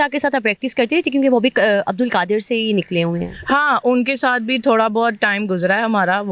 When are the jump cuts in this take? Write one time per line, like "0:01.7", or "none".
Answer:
none